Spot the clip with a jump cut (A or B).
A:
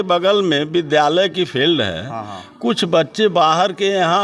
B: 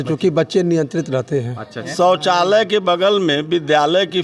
B